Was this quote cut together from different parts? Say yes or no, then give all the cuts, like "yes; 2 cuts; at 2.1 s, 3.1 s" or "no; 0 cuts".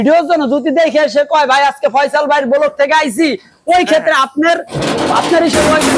no; 0 cuts